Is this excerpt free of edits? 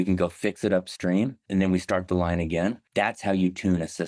no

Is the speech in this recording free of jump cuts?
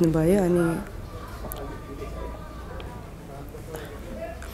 yes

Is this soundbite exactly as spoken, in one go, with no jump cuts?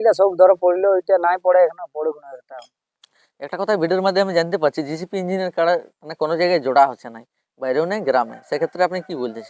yes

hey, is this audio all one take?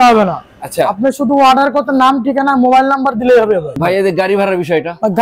no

